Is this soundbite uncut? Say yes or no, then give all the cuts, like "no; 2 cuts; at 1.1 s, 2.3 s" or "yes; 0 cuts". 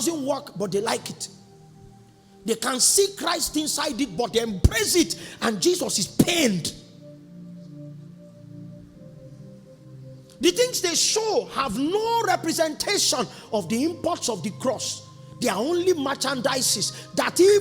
yes; 0 cuts